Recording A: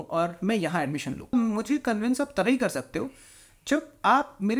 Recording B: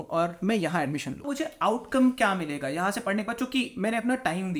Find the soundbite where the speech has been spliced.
B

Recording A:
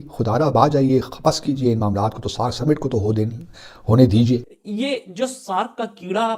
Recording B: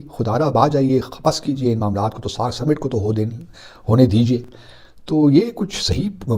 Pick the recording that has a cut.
A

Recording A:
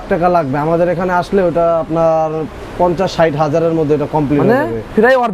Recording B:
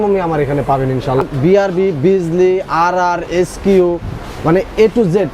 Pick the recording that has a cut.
B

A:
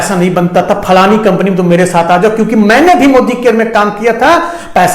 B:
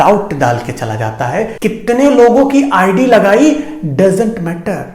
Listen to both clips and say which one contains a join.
B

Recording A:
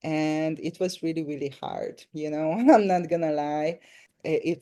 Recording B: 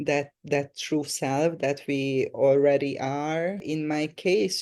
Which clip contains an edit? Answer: B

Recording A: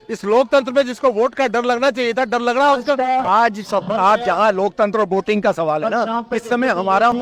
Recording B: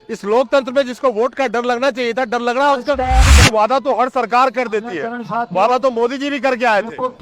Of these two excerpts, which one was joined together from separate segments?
B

